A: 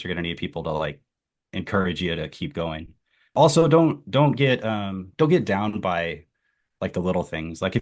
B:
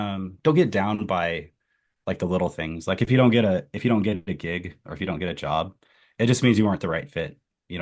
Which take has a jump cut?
A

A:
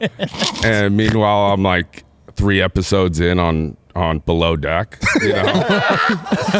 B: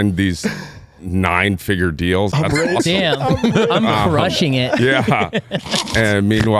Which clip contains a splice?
B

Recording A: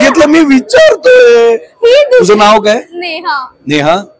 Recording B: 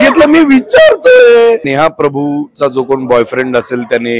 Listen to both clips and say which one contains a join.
B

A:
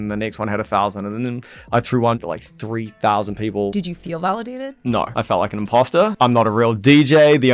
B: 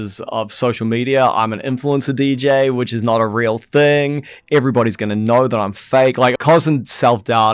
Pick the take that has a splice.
A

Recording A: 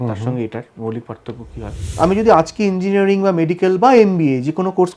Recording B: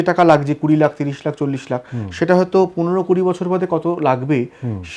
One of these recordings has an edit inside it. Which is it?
A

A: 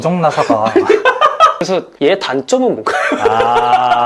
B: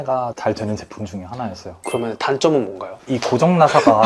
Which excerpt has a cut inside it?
A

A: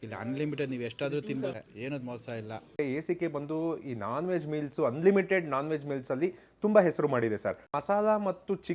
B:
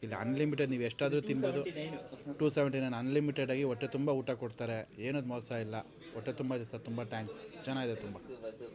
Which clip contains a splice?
A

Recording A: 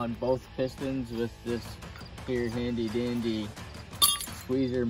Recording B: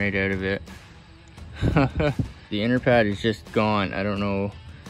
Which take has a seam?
B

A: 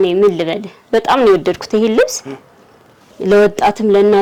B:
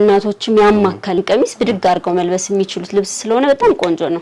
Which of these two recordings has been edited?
B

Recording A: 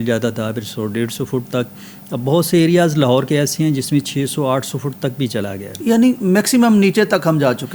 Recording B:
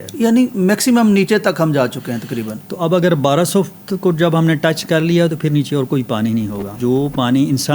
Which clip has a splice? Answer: B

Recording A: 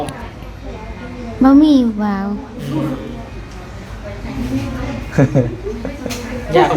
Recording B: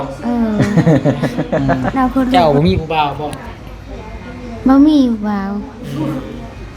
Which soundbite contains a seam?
B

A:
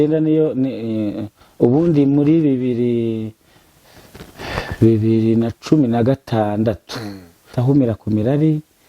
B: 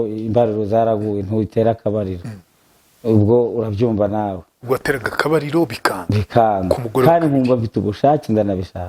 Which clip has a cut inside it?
A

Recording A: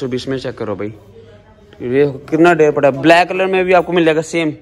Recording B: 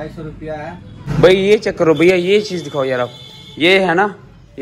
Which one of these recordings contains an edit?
B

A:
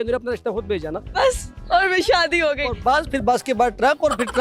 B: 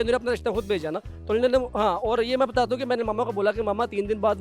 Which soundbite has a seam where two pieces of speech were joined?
A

